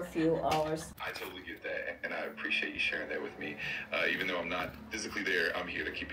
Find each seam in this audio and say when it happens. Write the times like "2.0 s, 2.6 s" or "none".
0.9 s